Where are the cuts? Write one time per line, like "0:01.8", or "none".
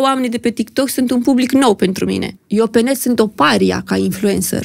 0:02.4